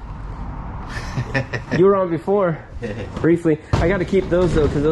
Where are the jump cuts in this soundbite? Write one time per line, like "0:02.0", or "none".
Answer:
none